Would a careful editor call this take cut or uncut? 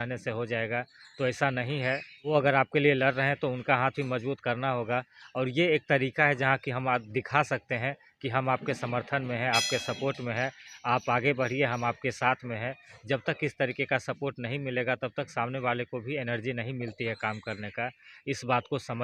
uncut